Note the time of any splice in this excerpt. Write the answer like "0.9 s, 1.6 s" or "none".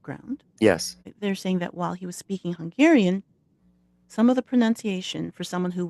1.1 s